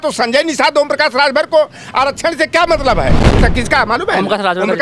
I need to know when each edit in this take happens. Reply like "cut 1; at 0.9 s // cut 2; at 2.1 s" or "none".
cut 1; at 3.4 s